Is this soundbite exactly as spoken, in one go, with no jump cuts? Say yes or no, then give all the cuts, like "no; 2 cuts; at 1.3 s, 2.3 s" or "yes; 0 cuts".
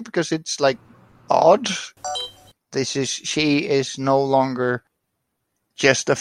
no; 1 cut; at 2.1 s